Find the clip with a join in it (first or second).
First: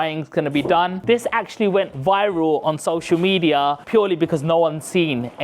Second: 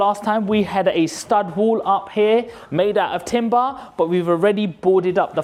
first